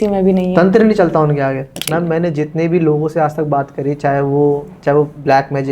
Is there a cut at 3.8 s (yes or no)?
no